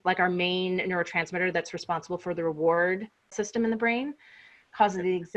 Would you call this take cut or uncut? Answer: cut